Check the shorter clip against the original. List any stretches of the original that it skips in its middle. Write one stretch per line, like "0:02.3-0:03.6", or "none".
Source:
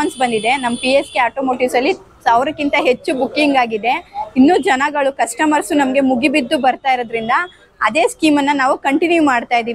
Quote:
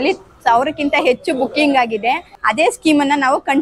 0:04.1-0:07.7